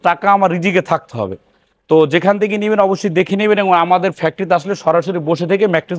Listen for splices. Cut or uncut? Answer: uncut